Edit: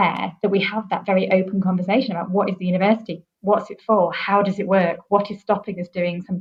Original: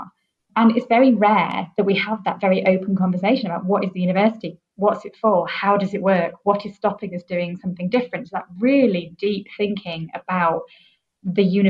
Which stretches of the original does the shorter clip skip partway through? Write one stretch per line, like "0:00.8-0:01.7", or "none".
none

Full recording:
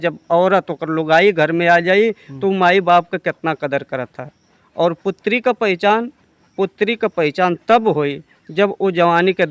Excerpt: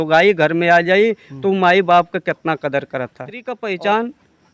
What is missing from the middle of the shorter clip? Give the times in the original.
0:04.5-0:05.5

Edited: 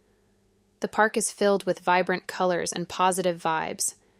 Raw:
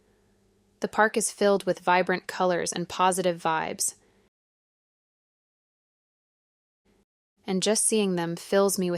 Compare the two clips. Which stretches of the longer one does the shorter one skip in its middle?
none

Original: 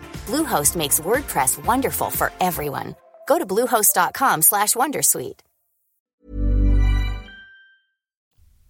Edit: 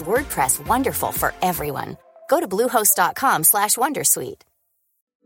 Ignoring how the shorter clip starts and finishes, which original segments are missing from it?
none

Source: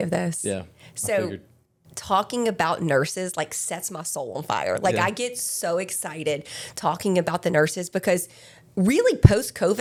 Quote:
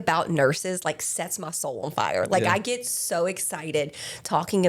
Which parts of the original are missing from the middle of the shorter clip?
none

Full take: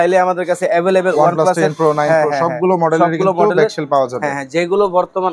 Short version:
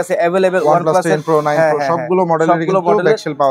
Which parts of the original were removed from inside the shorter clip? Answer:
none

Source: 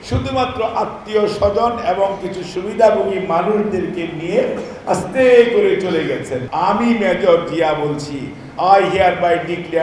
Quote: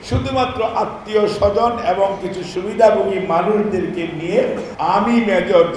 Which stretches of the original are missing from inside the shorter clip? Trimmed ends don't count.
0:04.7-0:06.4

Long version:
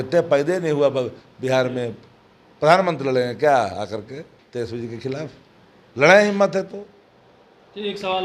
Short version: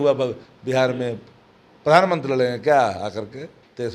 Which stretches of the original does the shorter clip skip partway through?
none

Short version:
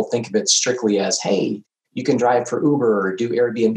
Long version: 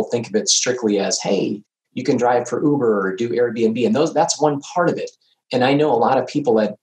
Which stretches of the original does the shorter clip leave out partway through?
none

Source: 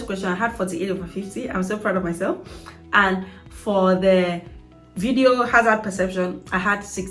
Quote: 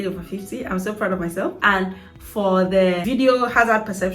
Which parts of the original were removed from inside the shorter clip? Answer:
0:02.4-0:02.9
0:04.3-0:05.0

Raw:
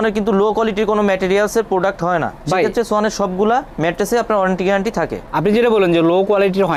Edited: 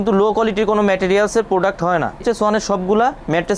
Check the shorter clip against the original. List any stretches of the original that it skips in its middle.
0:02.4-0:02.7

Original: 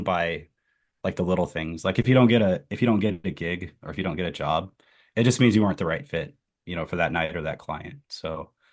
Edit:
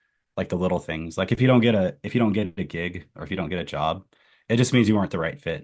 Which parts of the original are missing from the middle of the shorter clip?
none

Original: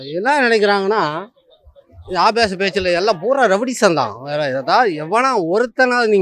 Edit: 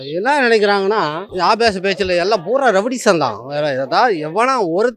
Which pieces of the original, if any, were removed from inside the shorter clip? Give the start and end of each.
0:01.2-0:02.0

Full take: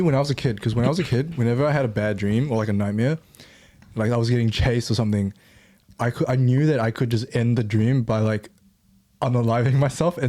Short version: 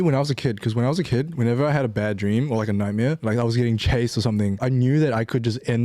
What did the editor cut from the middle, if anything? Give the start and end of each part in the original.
0:03.2-0:03.9
0:05.3-0:06.3

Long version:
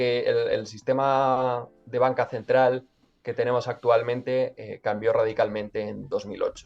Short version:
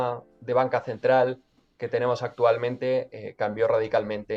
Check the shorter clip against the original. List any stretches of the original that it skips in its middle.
none

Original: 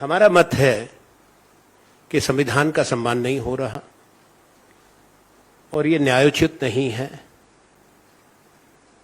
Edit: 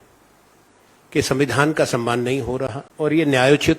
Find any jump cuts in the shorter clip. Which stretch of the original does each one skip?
0:03.8-0:05.6

